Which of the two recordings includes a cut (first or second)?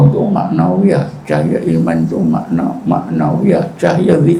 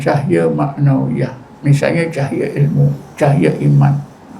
second